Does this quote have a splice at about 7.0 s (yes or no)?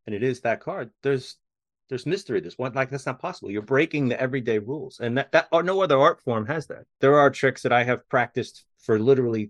yes